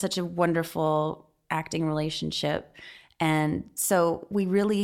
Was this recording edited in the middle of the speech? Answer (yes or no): no